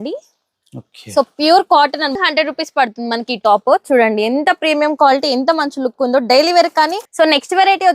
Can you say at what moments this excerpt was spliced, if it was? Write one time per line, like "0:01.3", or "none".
0:02.1
0:07.0